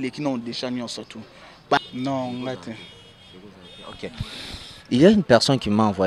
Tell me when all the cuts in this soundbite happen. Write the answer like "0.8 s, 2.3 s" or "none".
1.8 s